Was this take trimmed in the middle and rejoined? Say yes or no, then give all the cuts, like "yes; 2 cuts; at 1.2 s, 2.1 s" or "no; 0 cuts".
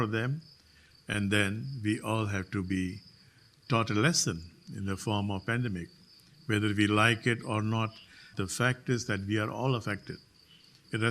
yes; 1 cut; at 8.4 s